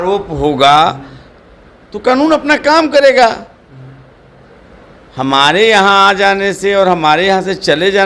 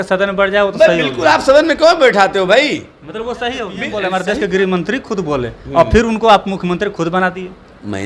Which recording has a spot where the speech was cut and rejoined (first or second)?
second